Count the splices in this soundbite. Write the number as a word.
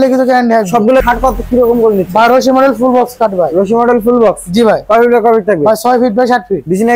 one